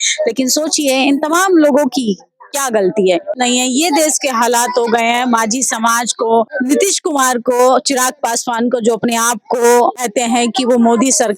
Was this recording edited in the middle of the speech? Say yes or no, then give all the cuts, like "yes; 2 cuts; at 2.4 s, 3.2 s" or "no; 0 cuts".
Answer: yes; 3 cuts; at 3.4 s, 6.5 s, 10.0 s